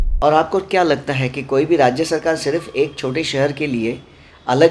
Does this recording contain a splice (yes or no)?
no